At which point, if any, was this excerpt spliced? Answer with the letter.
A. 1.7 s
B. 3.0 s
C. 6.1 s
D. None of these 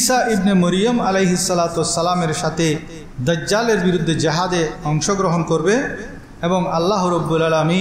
D